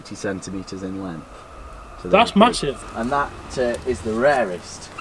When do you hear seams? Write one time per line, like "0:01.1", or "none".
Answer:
0:02.8